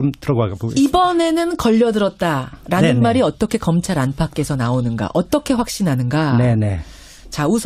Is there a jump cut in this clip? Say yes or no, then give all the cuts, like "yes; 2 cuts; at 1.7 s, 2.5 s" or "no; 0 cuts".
no; 0 cuts